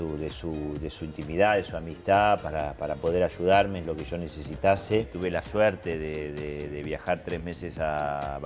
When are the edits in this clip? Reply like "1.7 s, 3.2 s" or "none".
5.1 s